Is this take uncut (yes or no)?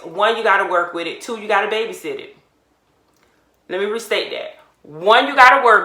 yes